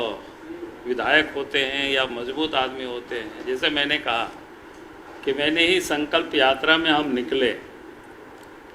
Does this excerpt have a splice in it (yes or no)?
no